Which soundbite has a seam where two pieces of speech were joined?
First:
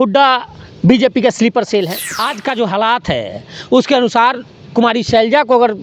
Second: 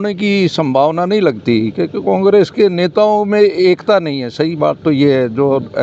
first; 1 cut; at 2.2 s

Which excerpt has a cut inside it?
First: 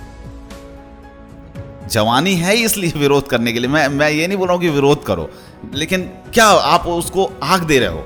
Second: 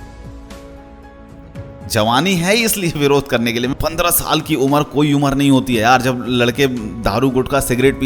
second; 1 cut; at 3.7 s

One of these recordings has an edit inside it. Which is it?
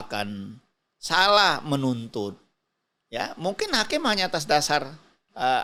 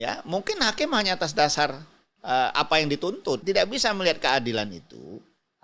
second; 1 cut; at 3.4 s

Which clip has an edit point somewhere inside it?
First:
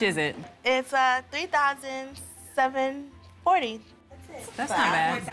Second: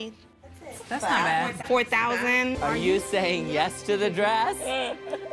second; 1 cut; at 2.6 s

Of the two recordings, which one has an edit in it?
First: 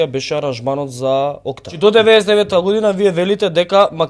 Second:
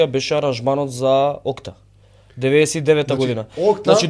first; 1 cut; at 1.7 s

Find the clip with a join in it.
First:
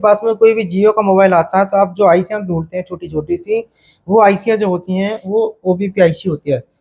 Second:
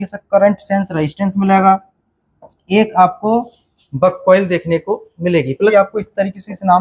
second; 1 cut; at 5.7 s

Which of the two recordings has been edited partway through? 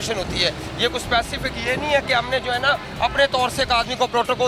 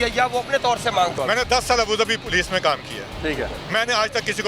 second; 2 cuts; at 1.1 s, 3.6 s

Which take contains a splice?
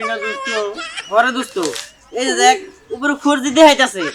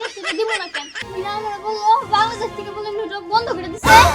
second; 1 cut; at 1.0 s

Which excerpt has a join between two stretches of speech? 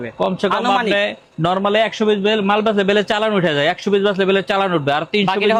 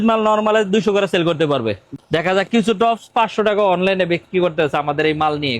second; 1 cut; at 2.0 s

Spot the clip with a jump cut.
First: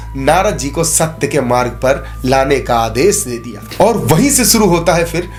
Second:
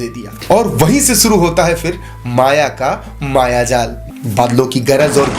second; 1 cut; at 4.0 s

